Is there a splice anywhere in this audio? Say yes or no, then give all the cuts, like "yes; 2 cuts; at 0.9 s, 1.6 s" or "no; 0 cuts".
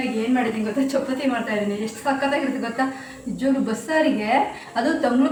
no; 0 cuts